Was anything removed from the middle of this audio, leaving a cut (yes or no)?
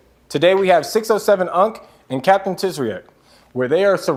no